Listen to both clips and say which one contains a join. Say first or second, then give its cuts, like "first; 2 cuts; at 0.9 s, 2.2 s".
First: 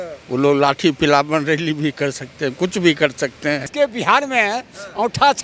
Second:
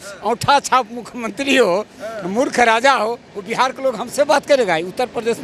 first; 1 cut; at 3.7 s